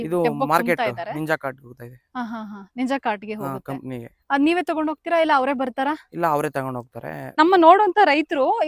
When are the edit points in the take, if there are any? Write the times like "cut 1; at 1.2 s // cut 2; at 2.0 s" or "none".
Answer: cut 1; at 7.3 s